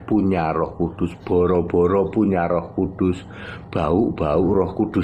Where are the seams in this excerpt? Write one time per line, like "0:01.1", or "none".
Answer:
none

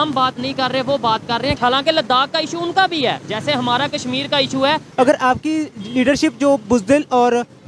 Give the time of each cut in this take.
0:04.9

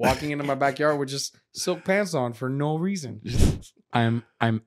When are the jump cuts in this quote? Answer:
0:03.4

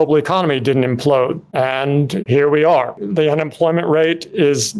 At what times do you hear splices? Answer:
0:03.0

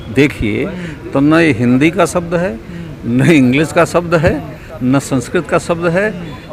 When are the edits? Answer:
none

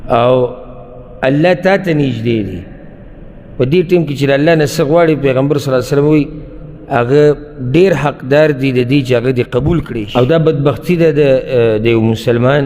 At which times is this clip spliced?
0:10.0

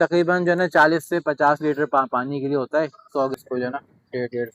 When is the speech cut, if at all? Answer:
0:03.3

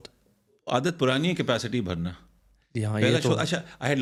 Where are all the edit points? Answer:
none

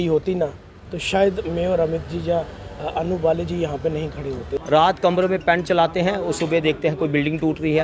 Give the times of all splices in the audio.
0:04.5

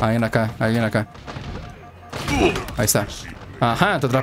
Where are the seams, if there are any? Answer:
none

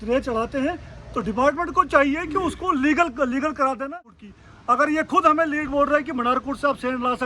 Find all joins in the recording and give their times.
0:04.1

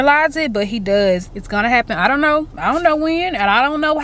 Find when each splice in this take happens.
0:01.3

